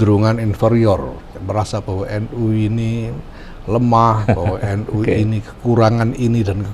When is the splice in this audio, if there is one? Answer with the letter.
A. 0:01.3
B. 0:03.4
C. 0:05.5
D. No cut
A